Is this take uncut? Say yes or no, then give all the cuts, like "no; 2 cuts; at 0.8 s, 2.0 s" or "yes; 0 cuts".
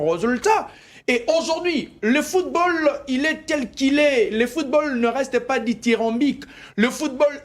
yes; 0 cuts